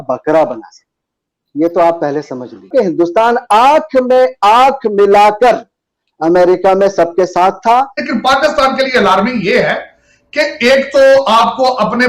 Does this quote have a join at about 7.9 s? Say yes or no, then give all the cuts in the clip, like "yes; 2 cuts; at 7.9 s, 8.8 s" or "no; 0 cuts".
yes; 2 cuts; at 2.7 s, 7.9 s